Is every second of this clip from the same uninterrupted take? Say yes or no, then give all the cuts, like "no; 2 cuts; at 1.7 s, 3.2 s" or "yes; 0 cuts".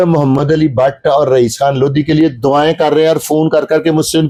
yes; 0 cuts